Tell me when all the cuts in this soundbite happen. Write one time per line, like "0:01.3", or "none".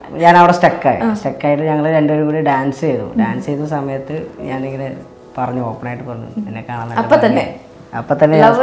none